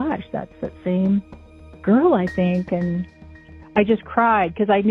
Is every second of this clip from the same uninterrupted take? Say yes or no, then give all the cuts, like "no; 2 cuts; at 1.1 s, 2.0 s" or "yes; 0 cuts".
no; 1 cut; at 3.1 s